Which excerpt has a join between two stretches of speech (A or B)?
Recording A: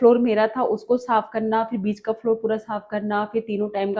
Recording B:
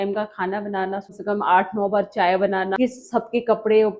B